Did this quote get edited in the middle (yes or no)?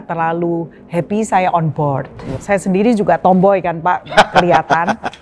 yes